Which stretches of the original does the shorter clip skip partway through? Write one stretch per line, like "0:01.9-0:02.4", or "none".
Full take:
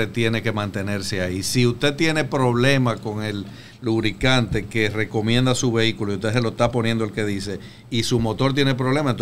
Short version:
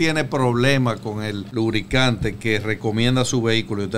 0:03.4-0:03.7